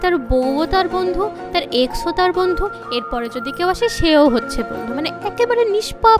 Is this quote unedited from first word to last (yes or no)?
yes